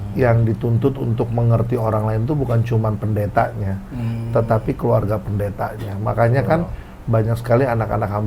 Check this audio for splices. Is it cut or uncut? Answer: uncut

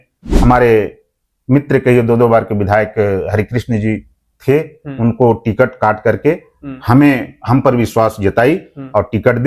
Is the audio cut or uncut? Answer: uncut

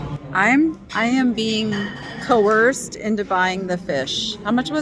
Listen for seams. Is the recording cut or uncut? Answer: uncut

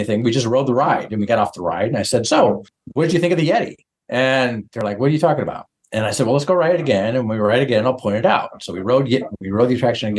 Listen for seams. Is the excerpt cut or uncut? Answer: uncut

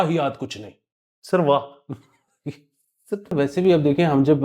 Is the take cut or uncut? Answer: cut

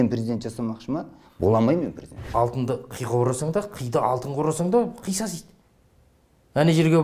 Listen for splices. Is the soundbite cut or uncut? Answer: cut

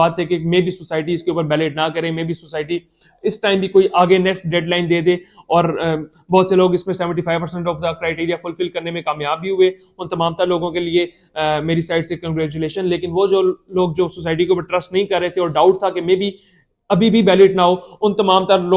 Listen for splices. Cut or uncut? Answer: uncut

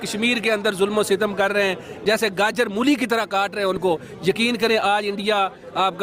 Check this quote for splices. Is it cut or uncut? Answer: uncut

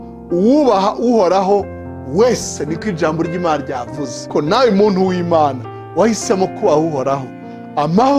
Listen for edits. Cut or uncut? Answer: cut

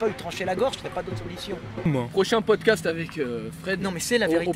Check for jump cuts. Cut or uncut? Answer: cut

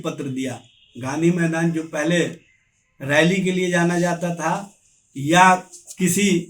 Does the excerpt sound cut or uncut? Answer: uncut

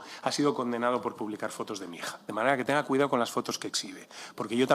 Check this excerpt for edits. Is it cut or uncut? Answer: uncut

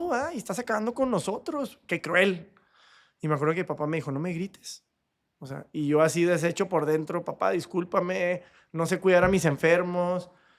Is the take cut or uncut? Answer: uncut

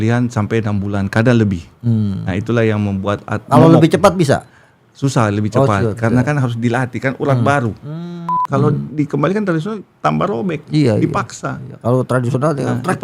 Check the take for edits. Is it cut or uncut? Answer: cut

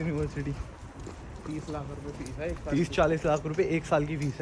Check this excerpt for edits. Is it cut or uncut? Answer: uncut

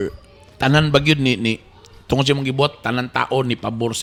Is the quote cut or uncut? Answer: uncut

